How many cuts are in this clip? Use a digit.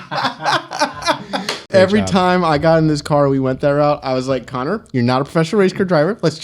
1